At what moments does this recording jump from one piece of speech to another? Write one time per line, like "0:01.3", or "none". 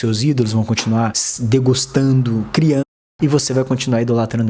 none